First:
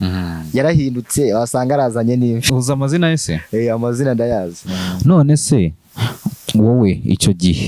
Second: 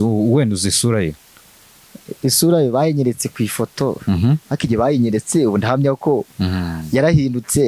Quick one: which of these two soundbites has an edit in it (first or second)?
first